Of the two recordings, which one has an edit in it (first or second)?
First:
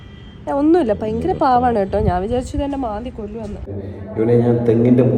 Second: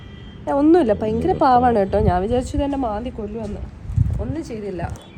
first